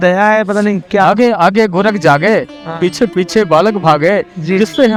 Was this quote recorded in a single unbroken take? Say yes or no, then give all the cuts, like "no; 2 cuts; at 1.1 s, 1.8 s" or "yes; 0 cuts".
yes; 0 cuts